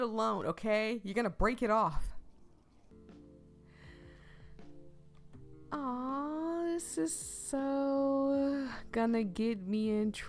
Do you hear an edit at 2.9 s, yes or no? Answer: yes